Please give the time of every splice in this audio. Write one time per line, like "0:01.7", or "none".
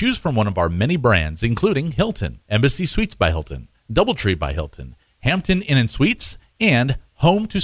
0:02.0